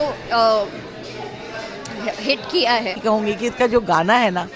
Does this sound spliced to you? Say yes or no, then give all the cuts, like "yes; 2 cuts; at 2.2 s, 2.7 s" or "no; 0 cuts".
yes; 1 cut; at 3.0 s